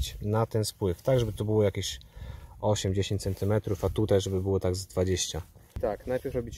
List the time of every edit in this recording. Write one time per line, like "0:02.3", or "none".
0:05.7